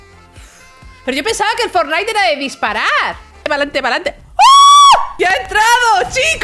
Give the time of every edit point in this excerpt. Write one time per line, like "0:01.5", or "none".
0:03.4
0:05.1

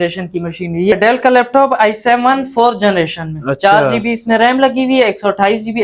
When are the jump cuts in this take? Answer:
0:00.9

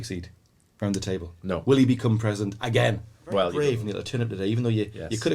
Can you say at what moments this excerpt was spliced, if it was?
0:03.5

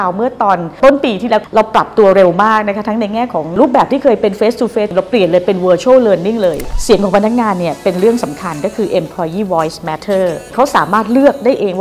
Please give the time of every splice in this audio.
0:04.9
0:06.7
0:10.5

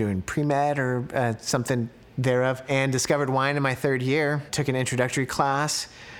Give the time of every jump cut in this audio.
0:02.7
0:04.5

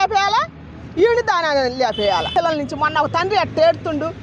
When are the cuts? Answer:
0:02.3

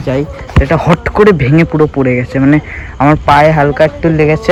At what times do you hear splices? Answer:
none

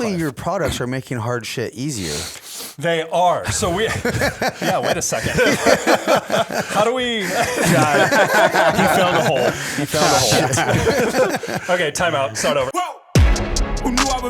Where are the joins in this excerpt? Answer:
0:12.7

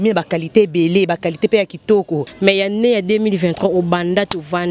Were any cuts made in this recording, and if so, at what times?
0:02.3

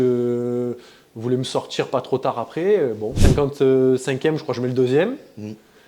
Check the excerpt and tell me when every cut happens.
0:03.1

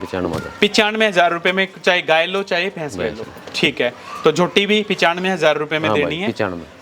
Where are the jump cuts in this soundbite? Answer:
none

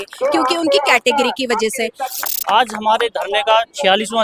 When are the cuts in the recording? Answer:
0:02.1

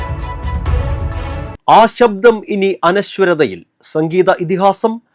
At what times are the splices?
0:01.5

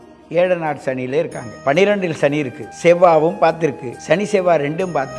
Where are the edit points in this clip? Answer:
0:01.4
0:02.6
0:03.9

